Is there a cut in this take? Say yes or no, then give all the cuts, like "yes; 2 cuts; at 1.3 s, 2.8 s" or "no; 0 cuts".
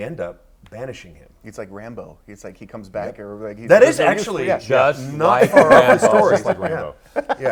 no; 0 cuts